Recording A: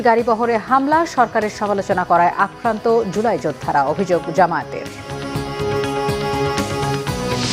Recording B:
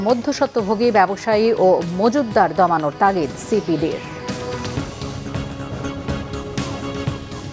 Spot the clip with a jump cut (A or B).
B